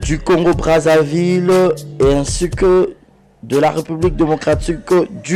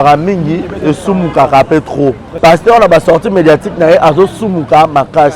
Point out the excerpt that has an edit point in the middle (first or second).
second